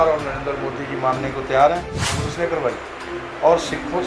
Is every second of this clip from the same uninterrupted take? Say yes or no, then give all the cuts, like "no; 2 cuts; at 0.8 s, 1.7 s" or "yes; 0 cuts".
no; 1 cut; at 2.1 s